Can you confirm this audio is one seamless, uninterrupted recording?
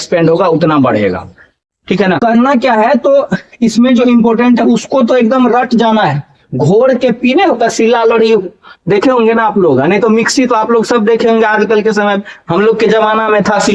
no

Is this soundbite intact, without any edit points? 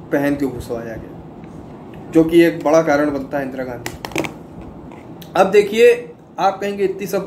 yes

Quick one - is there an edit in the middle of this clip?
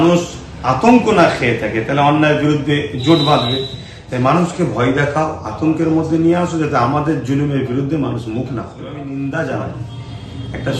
yes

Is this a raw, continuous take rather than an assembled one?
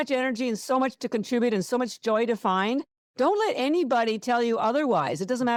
yes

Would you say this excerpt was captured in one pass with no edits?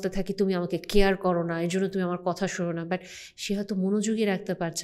yes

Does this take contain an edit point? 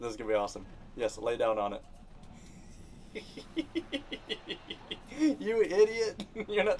no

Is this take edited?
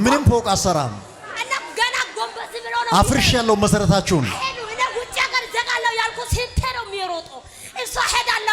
no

